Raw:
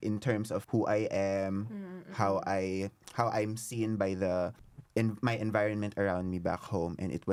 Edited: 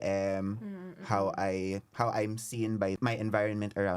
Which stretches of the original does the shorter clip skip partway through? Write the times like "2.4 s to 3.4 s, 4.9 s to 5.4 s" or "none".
2.9 s to 3.1 s, 4.2 s to 5.2 s